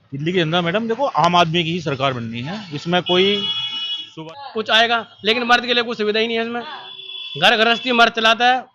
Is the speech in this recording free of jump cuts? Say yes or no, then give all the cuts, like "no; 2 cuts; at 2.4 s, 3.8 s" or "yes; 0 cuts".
no; 1 cut; at 4.0 s